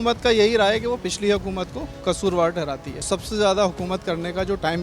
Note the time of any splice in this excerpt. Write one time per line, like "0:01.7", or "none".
0:01.8
0:03.1